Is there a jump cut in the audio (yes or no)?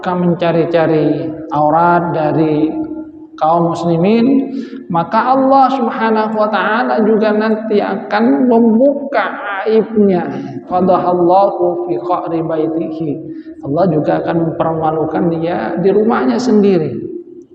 yes